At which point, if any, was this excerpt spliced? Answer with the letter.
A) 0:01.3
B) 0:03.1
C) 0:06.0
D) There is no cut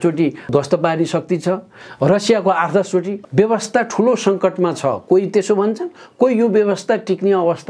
B